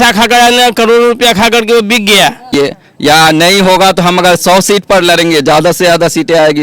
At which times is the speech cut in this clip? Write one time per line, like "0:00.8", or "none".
0:02.5